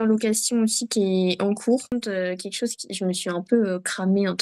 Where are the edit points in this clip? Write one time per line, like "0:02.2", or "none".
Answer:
0:01.9